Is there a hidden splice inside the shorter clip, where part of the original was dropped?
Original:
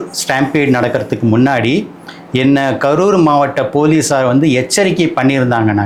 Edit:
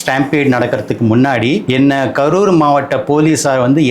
yes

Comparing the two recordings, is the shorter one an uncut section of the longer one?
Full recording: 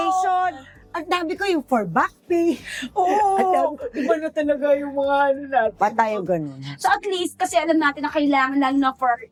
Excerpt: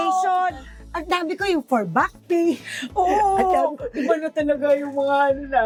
yes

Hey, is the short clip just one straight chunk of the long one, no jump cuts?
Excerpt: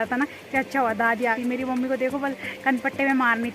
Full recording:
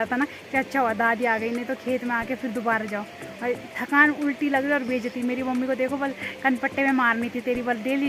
no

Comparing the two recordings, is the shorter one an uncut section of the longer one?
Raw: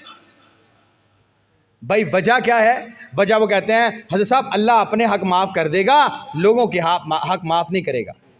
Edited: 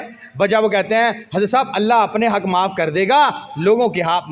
yes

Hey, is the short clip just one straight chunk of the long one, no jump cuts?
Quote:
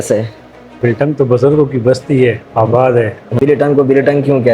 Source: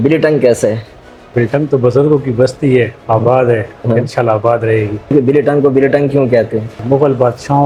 no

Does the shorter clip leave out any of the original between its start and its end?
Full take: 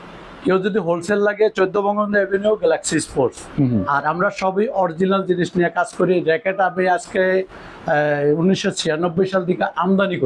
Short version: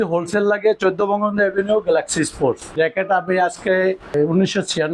yes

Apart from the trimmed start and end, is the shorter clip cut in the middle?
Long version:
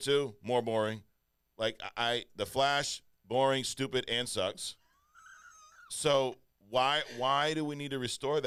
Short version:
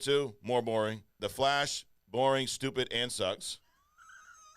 yes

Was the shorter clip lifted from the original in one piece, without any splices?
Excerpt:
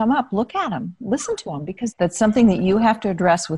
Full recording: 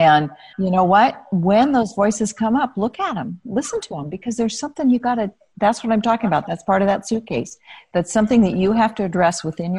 no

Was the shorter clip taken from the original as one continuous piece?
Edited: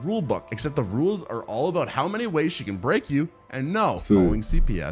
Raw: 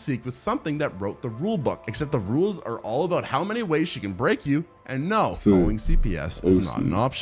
yes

